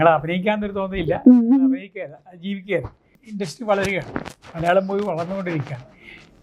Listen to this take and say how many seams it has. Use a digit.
1